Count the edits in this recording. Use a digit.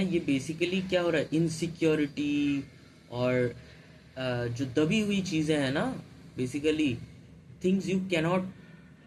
0